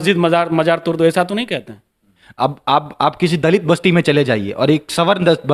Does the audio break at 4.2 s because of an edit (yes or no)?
no